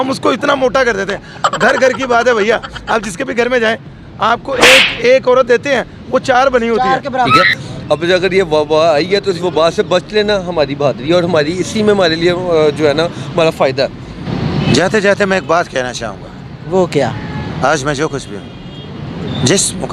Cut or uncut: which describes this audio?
cut